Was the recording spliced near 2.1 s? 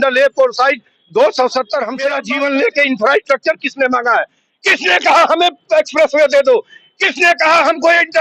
yes; 1 cut; at 2.1 s

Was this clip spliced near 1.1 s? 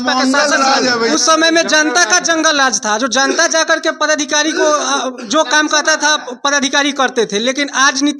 yes; 1 cut; at 1.1 s

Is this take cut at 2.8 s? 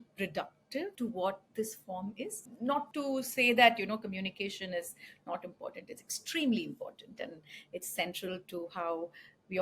yes; 2 cuts; at 0.9 s, 2.8 s

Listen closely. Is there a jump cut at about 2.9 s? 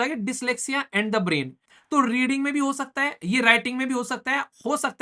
no; 1 cut; at 1.7 s

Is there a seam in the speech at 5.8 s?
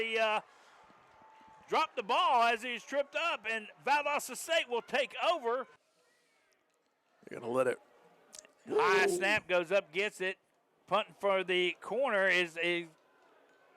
yes; 1 cut; at 5.8 s

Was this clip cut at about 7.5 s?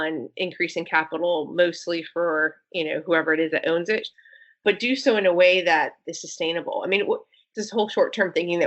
yes; 2 cuts; at 4.2 s, 7.5 s

